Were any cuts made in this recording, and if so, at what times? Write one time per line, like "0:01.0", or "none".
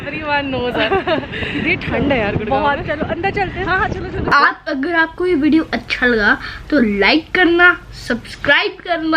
0:04.3